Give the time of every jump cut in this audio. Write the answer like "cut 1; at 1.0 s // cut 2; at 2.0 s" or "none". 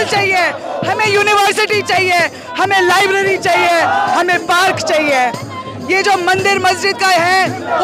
none

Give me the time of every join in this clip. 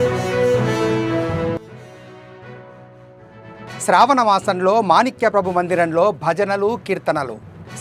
cut 1; at 1.5 s

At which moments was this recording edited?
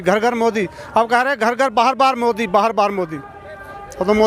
none

